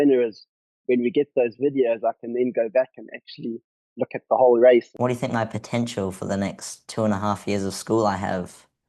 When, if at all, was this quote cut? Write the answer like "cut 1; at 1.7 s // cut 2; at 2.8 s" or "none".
cut 1; at 4.9 s